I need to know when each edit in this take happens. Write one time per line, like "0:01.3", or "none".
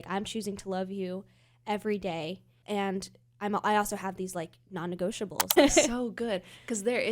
0:02.5
0:05.5